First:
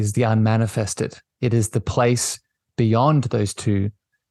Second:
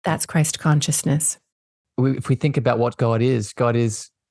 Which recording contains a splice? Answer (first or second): second